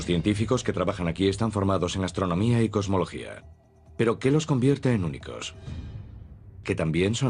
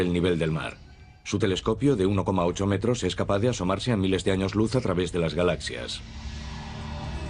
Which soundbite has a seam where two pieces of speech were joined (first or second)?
second